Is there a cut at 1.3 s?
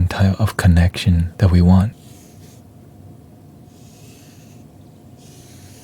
yes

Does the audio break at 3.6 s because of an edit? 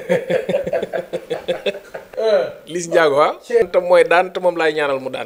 yes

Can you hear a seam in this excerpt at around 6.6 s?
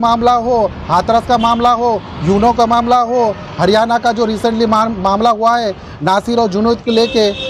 no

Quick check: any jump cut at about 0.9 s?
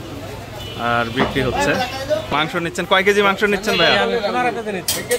no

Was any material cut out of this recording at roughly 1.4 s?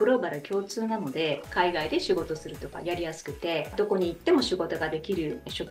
yes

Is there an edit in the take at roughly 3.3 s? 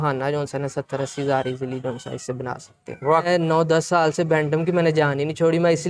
yes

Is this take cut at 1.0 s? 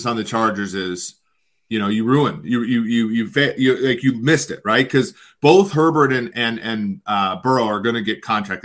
no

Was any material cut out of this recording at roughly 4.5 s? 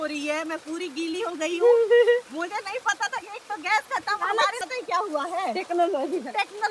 yes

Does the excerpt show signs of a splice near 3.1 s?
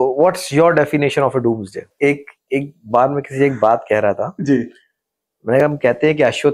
no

